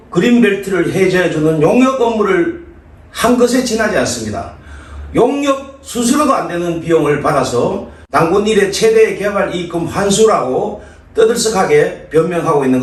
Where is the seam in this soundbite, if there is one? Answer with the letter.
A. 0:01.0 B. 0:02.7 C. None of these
C